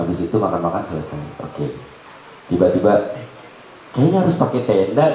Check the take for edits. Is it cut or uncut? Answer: uncut